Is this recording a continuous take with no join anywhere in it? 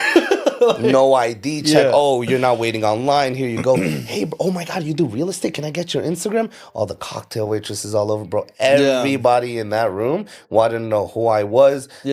yes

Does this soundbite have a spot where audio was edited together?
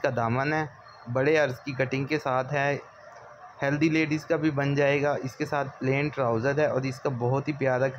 no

